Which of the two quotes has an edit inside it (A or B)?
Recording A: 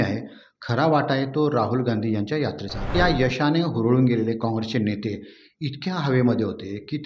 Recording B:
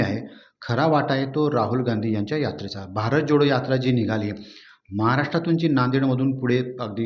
A